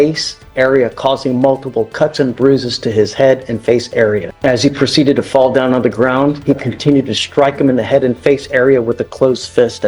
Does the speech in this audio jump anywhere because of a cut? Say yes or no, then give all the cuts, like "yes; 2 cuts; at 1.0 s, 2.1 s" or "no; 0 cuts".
yes; 1 cut; at 4.3 s